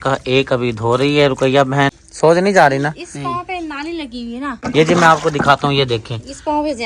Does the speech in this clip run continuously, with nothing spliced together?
no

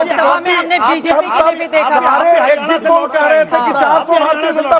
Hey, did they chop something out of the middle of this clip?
no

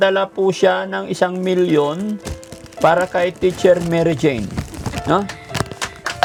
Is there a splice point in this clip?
no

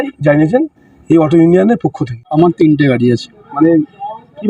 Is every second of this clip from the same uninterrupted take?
no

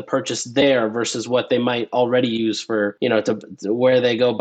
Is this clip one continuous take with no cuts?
no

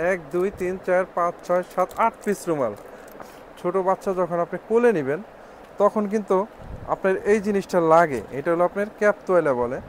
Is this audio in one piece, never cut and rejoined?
no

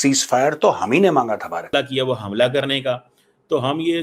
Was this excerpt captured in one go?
no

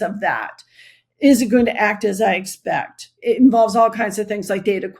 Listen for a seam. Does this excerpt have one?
yes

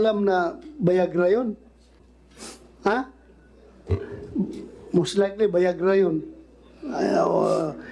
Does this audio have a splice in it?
yes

